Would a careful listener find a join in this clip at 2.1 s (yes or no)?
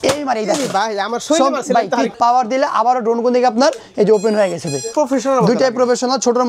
yes